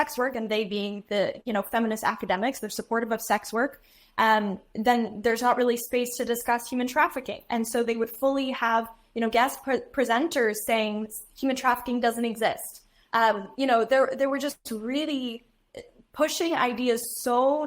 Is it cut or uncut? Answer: uncut